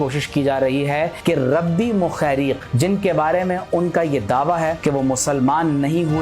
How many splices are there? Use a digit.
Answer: 3